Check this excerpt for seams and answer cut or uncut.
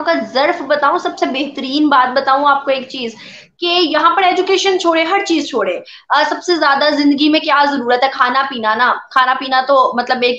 uncut